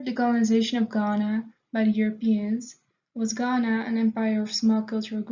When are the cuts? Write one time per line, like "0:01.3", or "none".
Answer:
0:01.6